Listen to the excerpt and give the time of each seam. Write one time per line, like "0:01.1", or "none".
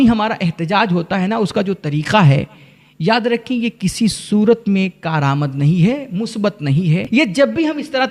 none

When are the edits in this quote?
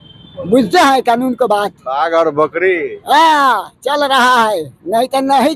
none

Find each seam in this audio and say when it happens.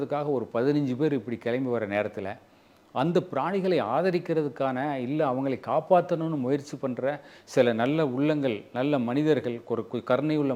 none

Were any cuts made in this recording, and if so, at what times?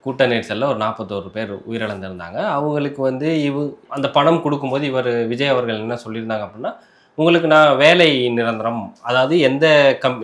0:03.8

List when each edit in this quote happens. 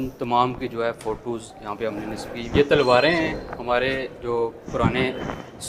0:02.5

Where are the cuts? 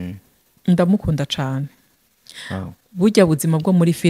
none

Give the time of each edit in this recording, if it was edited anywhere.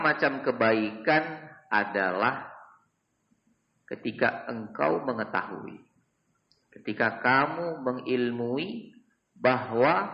none

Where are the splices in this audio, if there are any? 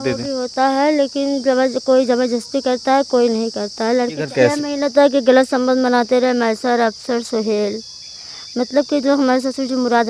0:04.2

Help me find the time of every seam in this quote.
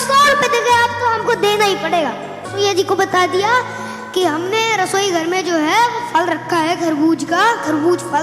0:02.4

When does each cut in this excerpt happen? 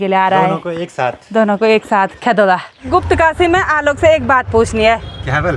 0:02.9

